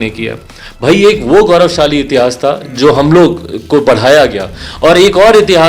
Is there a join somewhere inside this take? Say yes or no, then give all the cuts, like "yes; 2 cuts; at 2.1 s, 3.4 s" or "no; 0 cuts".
no; 0 cuts